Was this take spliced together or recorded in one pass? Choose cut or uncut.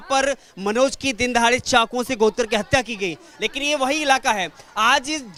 uncut